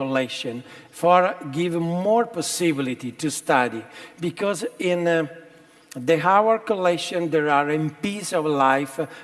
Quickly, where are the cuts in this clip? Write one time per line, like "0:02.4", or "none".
0:03.4